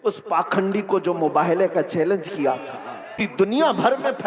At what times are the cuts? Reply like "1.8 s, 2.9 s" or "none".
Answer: 3.3 s